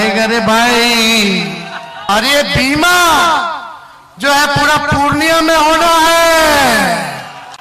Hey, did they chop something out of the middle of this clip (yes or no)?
yes